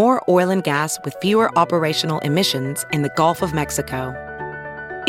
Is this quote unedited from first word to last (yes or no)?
yes